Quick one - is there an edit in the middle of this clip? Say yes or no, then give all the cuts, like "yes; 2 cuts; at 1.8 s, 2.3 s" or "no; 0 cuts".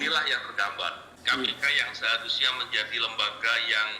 yes; 1 cut; at 1.1 s